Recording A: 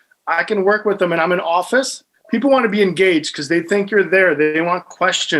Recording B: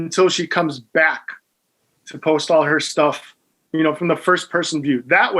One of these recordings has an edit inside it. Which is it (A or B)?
A